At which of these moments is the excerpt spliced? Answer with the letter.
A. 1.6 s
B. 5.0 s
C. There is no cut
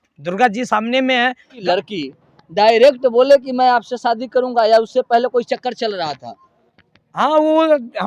A